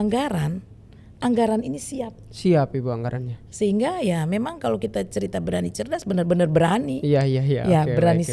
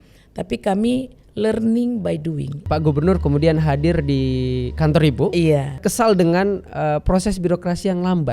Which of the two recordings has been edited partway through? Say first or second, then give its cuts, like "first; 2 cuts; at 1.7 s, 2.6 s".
second; 2 cuts; at 2.6 s, 5.8 s